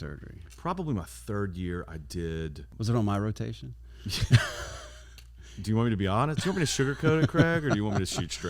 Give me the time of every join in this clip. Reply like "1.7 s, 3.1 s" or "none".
2.7 s

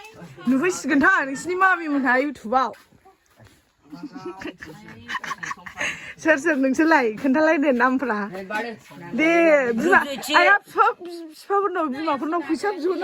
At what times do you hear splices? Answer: none

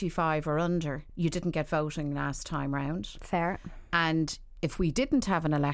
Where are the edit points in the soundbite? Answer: 1.0 s

